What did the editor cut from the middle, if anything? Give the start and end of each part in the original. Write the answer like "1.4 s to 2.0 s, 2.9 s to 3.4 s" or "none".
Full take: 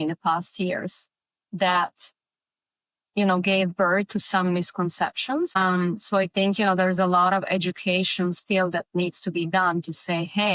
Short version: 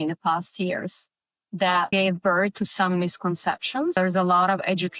1.9 s to 3.4 s, 5.5 s to 6.8 s